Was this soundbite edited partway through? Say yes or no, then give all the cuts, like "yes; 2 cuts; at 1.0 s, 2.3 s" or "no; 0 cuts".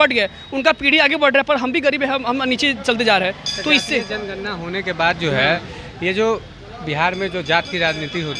no; 0 cuts